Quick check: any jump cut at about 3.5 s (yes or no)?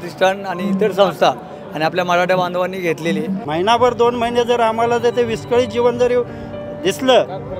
yes